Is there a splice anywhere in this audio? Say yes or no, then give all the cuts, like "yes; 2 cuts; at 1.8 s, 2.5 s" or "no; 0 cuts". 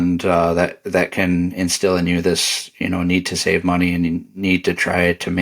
no; 0 cuts